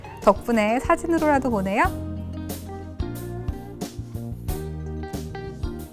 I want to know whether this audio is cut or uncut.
cut